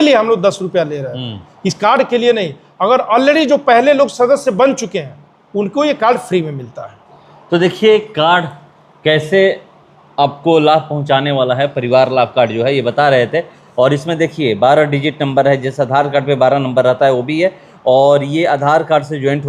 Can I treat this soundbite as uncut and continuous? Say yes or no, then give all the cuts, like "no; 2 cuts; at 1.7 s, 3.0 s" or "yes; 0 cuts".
yes; 0 cuts